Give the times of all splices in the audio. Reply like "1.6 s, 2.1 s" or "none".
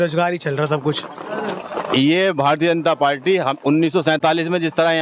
1.5 s